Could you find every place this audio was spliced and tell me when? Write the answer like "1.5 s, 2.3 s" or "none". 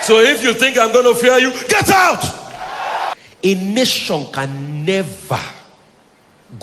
3.1 s